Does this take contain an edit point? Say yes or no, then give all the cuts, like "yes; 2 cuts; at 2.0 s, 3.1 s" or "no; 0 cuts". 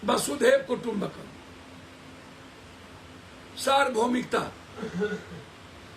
no; 0 cuts